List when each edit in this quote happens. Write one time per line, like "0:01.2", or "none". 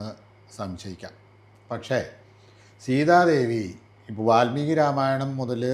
none